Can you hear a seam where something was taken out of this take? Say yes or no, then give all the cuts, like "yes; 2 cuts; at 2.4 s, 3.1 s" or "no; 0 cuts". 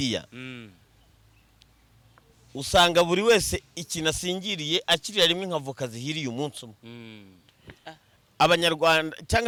no; 0 cuts